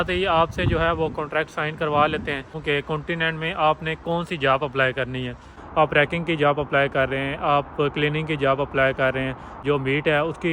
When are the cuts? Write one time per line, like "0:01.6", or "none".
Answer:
0:02.5
0:05.5
0:09.6